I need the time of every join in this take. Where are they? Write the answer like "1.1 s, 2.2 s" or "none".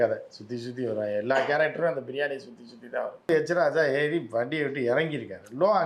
3.3 s